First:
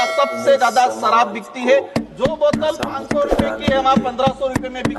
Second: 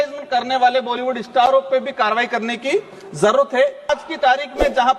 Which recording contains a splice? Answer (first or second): second